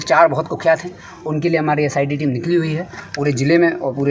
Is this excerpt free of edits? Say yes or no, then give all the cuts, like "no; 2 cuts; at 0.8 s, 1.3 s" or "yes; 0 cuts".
yes; 0 cuts